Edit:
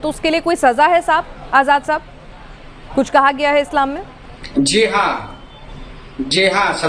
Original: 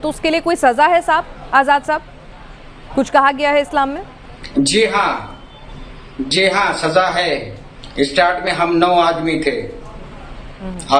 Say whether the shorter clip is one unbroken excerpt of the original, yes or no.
yes